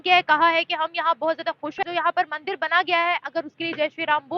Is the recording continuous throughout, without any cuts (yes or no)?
no